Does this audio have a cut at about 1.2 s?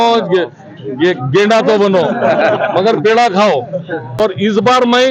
no; 1 cut; at 4.2 s

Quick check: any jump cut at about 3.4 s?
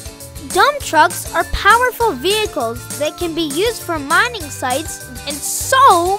no; 1 cut; at 5.0 s

